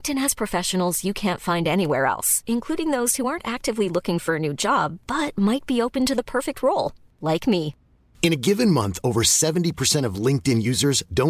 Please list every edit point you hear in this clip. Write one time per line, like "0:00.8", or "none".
none